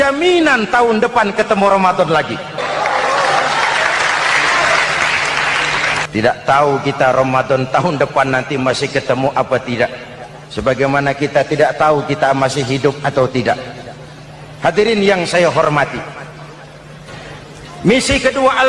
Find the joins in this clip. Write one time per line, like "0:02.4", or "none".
0:02.6
0:06.1